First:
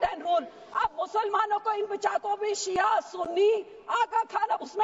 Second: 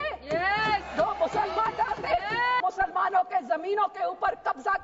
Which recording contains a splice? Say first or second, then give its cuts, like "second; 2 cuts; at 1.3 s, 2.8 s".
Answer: second; 1 cut; at 2.6 s